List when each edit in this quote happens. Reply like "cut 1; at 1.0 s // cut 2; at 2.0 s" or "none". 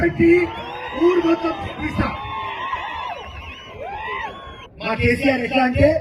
cut 1; at 4.6 s